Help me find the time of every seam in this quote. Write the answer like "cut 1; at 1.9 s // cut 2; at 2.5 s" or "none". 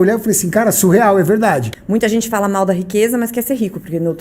cut 1; at 1.7 s